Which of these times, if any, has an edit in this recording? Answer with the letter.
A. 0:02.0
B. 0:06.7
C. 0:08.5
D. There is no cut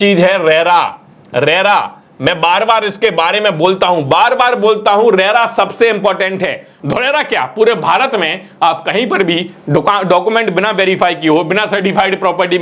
B